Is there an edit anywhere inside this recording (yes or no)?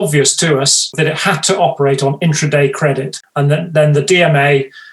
yes